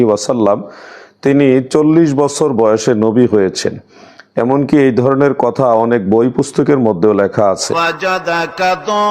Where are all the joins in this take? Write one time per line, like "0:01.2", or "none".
0:07.7

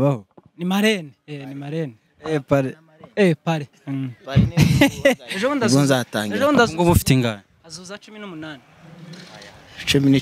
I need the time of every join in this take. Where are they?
0:05.3

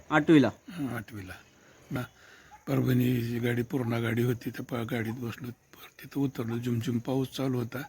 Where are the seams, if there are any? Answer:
0:02.0

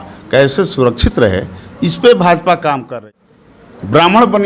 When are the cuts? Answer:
0:03.0

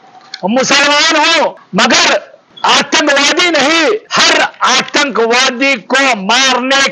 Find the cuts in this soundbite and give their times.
0:01.6
0:02.4
0:04.1

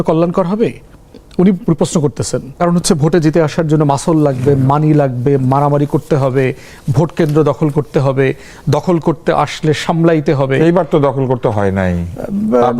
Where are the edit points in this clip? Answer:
0:02.5

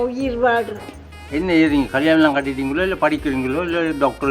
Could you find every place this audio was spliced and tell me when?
0:01.2

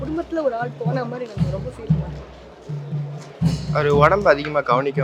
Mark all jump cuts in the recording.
none

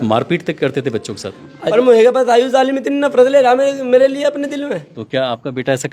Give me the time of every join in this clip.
0:01.7
0:04.9

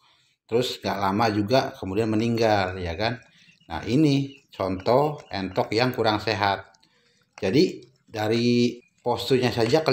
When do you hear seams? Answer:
0:08.9

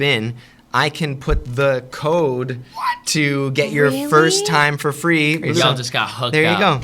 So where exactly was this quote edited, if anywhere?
0:05.6

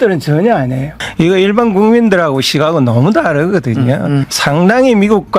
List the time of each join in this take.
0:01.0
0:04.3

